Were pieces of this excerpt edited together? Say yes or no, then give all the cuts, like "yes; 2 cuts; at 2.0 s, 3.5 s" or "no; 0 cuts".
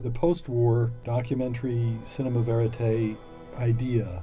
yes; 1 cut; at 1.0 s